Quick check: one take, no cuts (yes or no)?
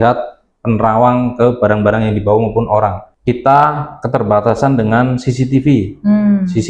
no